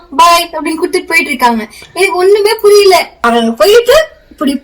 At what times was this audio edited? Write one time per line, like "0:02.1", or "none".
0:03.1